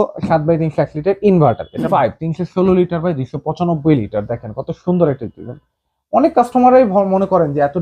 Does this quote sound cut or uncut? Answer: cut